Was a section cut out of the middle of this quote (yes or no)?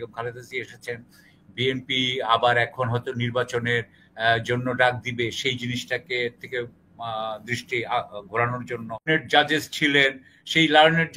yes